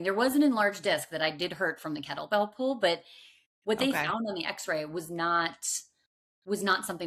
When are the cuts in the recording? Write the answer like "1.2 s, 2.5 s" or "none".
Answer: none